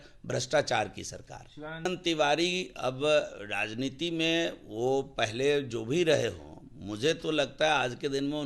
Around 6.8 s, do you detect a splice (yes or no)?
no